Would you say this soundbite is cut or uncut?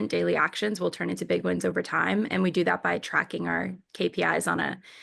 uncut